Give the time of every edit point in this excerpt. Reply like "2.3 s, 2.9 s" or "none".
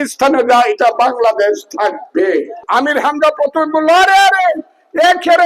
2.6 s